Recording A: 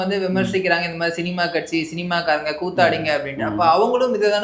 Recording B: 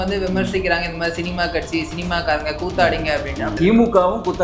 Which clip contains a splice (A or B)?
B